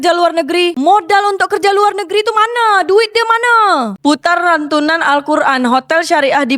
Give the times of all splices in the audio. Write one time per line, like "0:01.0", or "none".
0:04.0